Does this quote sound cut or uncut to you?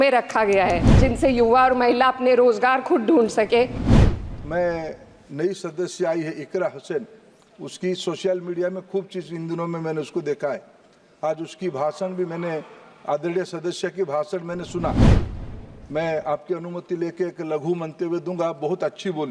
cut